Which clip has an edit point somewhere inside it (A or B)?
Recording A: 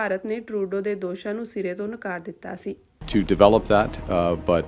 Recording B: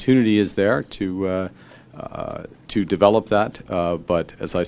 A